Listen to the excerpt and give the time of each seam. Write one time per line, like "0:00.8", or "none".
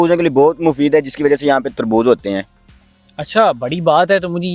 none